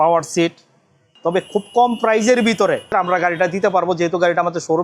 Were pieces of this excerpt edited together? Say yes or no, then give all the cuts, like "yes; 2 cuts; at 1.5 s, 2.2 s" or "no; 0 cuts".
yes; 1 cut; at 1.1 s